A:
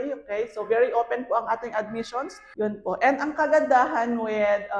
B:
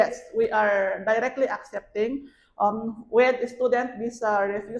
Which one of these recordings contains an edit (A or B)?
A